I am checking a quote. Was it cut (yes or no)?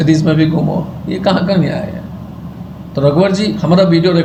no